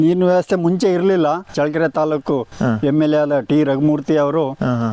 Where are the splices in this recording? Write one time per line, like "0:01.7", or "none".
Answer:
0:01.5